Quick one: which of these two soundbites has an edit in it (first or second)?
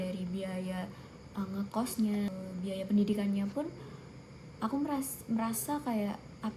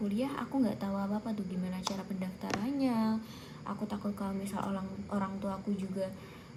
first